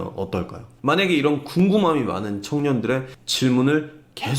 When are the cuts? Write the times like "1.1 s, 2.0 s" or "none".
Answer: 3.2 s